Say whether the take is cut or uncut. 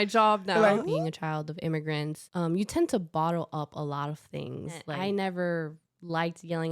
cut